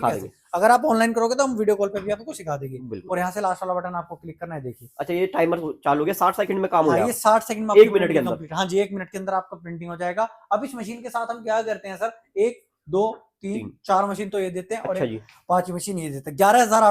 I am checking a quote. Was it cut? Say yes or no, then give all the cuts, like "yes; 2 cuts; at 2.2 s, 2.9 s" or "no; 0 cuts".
no; 0 cuts